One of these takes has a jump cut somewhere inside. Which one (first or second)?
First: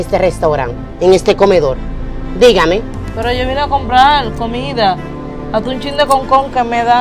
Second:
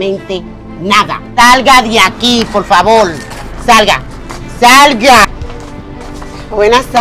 second